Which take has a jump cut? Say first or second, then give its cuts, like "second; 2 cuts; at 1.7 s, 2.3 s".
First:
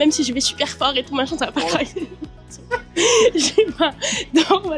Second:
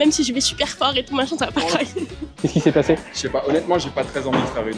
second; 1 cut; at 2.3 s